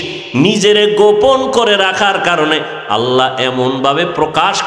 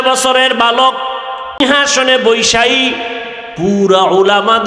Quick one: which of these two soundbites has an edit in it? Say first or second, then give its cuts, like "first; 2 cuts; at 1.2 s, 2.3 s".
second; 1 cut; at 1.6 s